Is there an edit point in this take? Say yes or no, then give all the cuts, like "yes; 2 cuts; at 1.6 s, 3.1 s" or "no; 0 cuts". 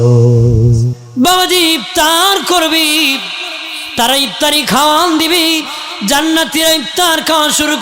yes; 1 cut; at 1.0 s